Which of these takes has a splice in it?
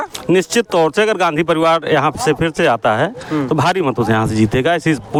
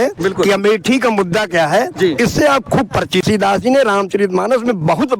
second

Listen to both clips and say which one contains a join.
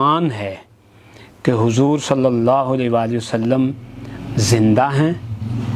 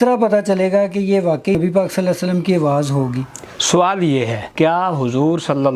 second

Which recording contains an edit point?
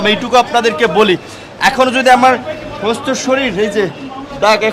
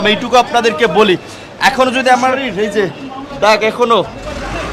second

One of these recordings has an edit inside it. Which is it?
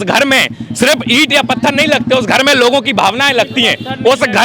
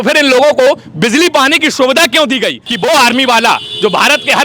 second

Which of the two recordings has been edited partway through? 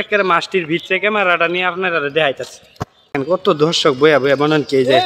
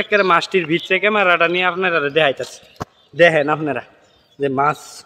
first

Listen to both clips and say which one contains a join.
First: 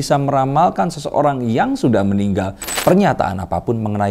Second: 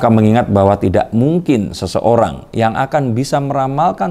first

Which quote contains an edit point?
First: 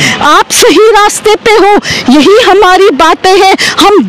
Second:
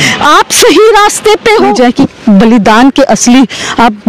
second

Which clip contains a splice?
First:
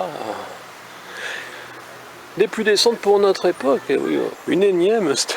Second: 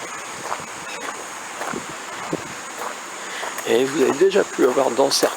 first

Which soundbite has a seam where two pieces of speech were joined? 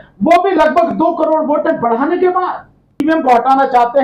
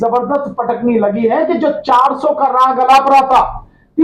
first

